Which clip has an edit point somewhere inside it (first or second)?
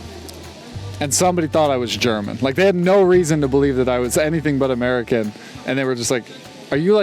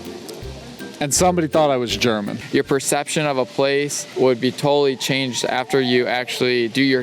second